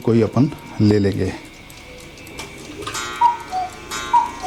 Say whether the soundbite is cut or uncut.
uncut